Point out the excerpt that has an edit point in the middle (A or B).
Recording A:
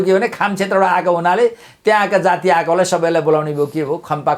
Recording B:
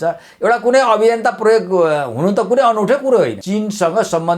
B